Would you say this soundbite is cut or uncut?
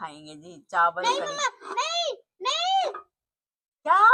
uncut